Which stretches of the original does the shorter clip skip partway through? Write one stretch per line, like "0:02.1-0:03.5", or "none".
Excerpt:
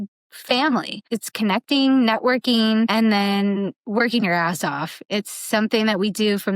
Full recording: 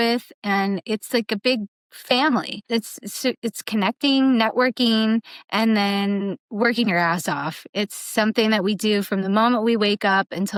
0:02.7-0:03.4
0:05.2-0:05.5